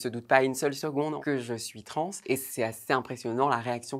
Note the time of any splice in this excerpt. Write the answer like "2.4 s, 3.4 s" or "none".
1.2 s